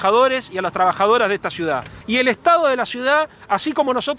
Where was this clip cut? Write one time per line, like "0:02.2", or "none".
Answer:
0:01.9